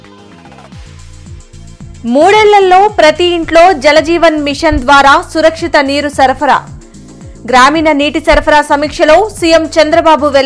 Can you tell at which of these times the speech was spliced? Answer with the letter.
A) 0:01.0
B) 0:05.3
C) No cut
A